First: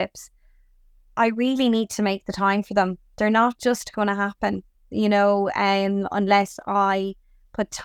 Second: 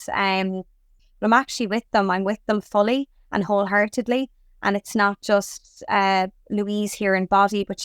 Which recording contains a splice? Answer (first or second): second